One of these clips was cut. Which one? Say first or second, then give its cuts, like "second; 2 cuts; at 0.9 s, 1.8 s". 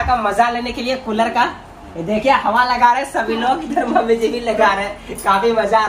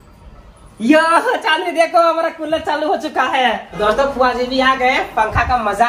second; 1 cut; at 3.8 s